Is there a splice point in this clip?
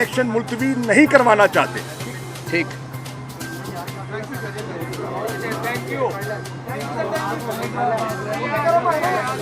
no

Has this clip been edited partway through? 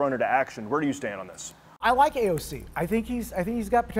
yes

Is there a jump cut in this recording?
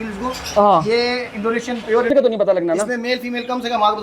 yes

